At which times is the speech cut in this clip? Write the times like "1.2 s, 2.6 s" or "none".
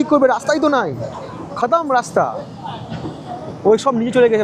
none